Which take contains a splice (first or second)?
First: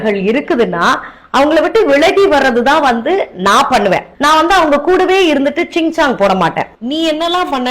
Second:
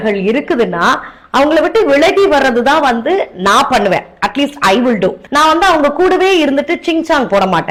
first